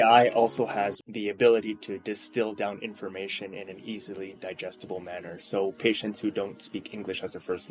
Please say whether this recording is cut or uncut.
cut